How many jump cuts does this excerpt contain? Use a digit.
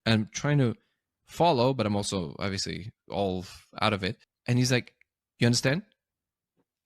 1